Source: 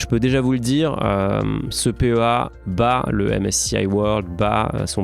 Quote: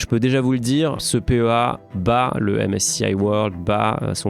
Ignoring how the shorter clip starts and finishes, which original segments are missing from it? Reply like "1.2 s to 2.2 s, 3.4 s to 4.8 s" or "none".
1.0 s to 1.7 s